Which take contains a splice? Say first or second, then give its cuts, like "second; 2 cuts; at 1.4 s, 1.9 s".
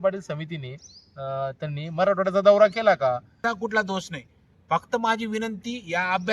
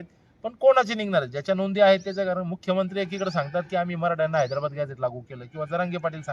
first; 1 cut; at 3.3 s